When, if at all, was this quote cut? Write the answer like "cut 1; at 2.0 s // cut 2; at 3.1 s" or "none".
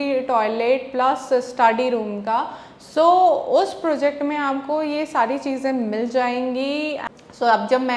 cut 1; at 7.0 s